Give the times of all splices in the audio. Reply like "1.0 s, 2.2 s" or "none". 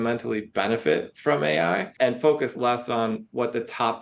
1.9 s